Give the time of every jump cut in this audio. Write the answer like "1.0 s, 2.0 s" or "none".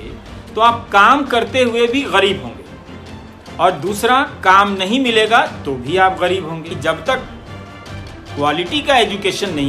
6.7 s